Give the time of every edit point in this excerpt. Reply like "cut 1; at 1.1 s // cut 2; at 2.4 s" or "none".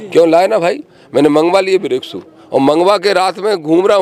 none

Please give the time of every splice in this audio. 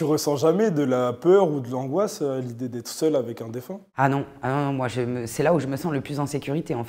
none

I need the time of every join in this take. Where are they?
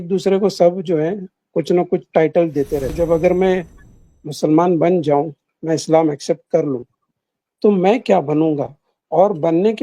cut 1; at 2.9 s

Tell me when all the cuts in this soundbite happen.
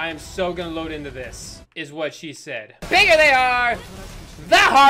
cut 1; at 2.9 s

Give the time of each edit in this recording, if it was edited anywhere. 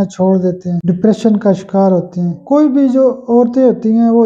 cut 1; at 0.8 s // cut 2; at 2.4 s

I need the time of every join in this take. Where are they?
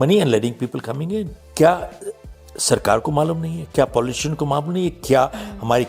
cut 1; at 1.4 s

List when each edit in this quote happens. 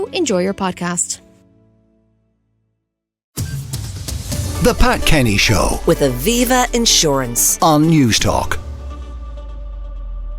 cut 1; at 3.3 s

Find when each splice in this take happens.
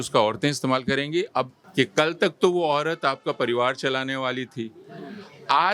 cut 1; at 1.6 s

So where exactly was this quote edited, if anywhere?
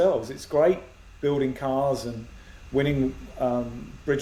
none

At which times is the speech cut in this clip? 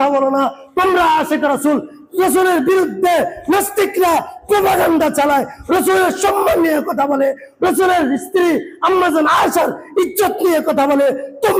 none

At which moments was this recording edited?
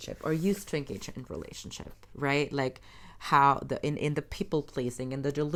none

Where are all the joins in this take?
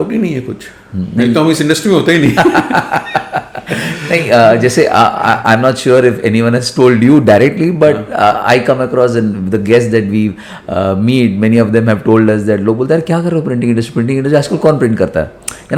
none

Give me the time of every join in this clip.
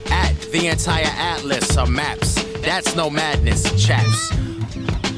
cut 1; at 3.1 s

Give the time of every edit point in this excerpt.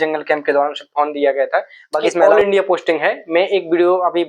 cut 1; at 2.2 s

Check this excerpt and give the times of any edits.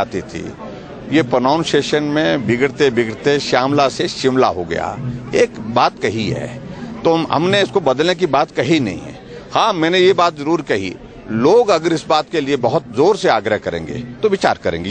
none

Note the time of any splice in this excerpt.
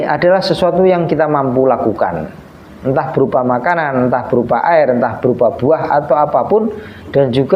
none

